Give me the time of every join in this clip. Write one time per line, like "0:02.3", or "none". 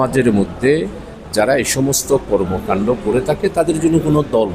none